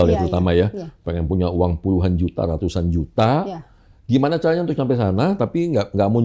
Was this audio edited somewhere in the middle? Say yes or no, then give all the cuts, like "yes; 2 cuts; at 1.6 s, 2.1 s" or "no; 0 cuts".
no; 0 cuts